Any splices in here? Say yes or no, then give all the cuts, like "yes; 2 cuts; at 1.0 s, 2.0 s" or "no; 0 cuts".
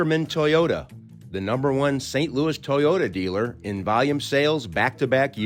no; 0 cuts